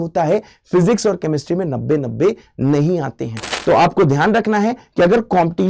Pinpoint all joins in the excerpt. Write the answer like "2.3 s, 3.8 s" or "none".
3.5 s